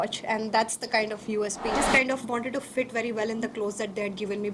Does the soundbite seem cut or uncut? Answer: cut